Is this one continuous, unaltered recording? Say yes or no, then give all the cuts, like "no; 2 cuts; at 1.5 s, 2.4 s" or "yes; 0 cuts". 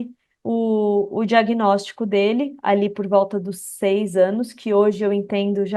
yes; 0 cuts